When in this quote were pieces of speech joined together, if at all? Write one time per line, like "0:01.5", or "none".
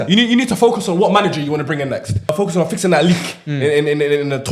0:02.3

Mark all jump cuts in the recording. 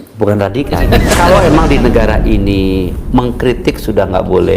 0:01.1

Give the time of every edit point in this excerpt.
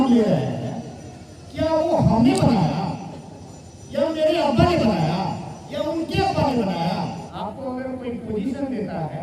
0:07.3

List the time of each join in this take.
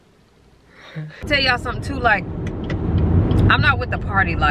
0:01.2

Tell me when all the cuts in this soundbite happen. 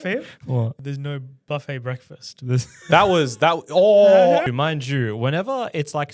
0:00.7
0:04.5

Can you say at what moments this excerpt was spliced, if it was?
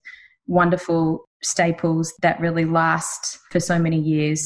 0:01.2
0:02.1
0:03.4

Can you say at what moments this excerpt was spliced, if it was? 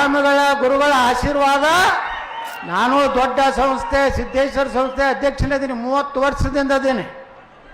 0:02.5

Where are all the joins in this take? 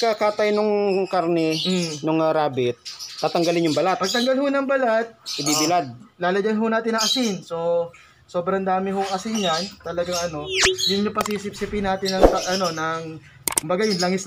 none

